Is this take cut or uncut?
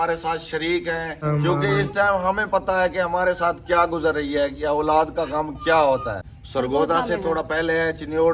cut